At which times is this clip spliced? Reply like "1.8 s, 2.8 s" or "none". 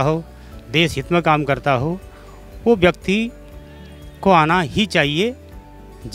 none